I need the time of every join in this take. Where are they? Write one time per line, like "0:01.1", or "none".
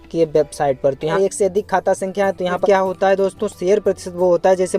0:01.2
0:02.6